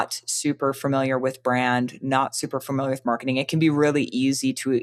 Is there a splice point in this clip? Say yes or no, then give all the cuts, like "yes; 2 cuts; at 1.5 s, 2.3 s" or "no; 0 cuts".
no; 0 cuts